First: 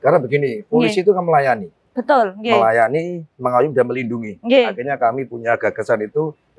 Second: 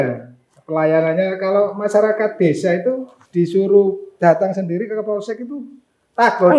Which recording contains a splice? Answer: second; 2 cuts; at 3.1 s, 4.1 s

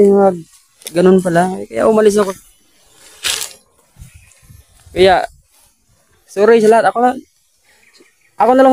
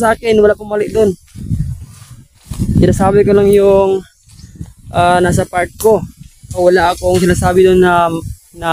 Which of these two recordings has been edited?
first; 1 cut; at 2.3 s

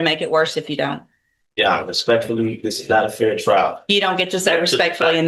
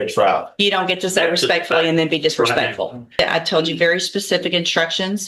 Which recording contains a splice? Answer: second; 1 cut; at 3.2 s

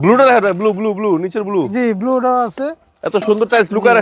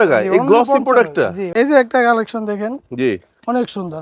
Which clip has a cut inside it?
second; 1 cut; at 1.5 s

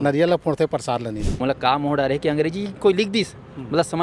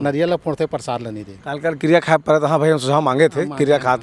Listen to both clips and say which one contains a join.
first; 1 cut; at 1.3 s

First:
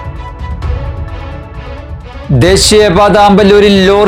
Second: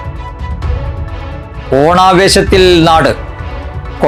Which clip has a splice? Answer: first; 1 cut; at 1.6 s

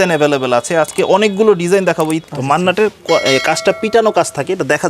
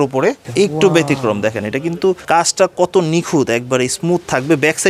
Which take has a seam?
first; 1 cut; at 2.2 s

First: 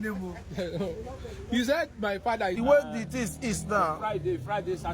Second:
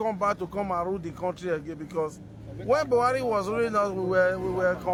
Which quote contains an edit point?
first; 1 cut; at 2.6 s

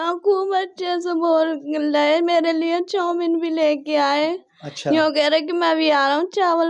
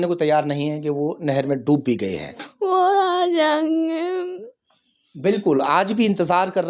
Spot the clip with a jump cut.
second; 1 cut; at 2.4 s

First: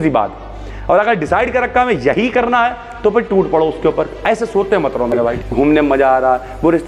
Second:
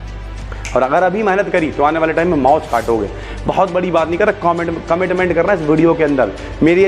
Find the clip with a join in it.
first; 1 cut; at 5.2 s

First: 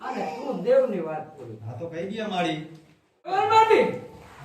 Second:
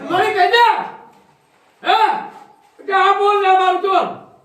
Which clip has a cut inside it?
first; 1 cut; at 3.3 s

